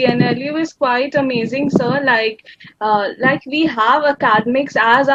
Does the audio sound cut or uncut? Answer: uncut